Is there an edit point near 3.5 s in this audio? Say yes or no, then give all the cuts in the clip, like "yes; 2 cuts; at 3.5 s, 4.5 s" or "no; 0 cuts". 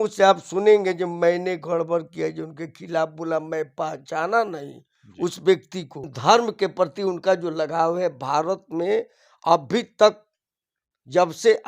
no; 1 cut; at 6.1 s